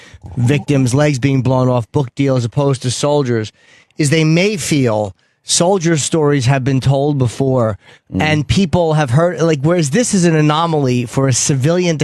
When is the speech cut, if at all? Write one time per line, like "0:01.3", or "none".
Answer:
none